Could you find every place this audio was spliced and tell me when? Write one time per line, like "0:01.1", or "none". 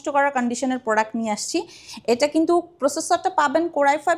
none